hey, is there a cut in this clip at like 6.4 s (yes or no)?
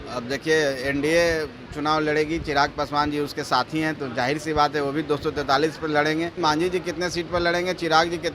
yes